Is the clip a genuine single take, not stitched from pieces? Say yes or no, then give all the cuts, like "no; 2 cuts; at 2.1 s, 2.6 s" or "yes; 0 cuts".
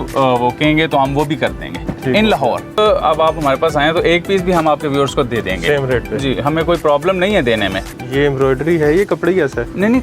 no; 2 cuts; at 2.8 s, 7.9 s